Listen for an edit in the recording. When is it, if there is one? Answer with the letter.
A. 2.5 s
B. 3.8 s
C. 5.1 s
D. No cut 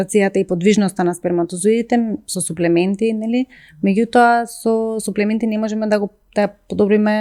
D